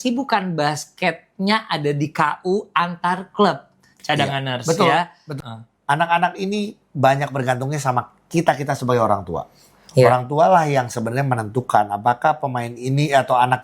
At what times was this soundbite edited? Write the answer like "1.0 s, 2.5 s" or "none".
5.2 s

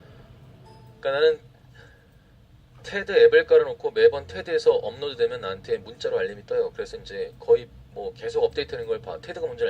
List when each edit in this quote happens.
5.5 s

